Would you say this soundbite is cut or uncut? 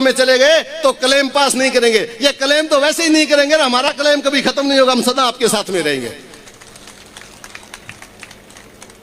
uncut